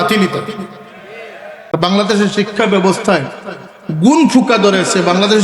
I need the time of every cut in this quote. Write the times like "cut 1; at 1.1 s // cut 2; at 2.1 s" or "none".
cut 1; at 1.7 s